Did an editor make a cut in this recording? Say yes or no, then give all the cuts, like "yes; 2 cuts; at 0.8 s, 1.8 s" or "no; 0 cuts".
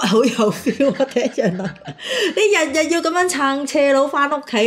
no; 0 cuts